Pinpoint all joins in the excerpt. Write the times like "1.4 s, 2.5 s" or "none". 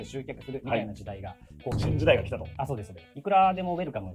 1.7 s, 3.2 s